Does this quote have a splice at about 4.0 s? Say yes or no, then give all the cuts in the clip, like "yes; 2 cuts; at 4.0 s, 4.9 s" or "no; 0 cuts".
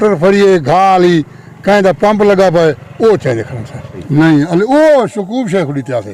yes; 1 cut; at 4.0 s